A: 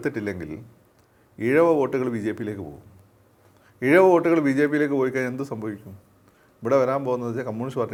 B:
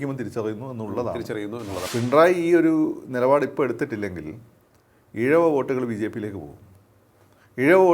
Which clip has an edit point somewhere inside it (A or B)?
B